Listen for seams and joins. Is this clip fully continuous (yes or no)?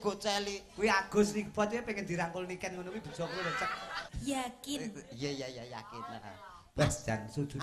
no